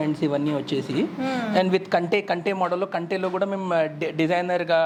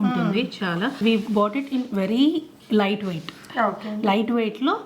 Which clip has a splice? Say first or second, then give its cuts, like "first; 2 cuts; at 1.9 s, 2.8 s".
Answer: second; 1 cut; at 1.0 s